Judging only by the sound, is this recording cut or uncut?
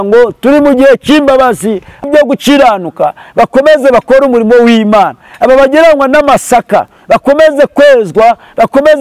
cut